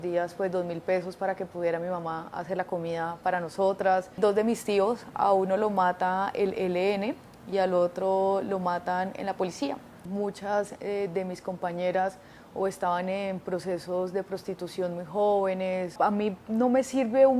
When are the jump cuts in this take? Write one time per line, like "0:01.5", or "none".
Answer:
0:04.2
0:10.1
0:15.9